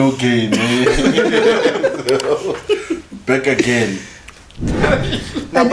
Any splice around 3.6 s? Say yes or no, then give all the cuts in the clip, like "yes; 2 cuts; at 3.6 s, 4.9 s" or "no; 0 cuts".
no; 1 cut; at 4.8 s